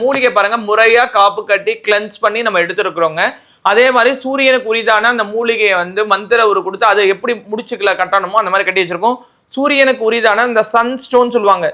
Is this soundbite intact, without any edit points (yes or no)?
yes